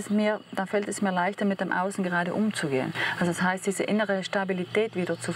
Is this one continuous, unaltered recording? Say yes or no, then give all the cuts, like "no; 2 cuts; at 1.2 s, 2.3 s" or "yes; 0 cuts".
yes; 0 cuts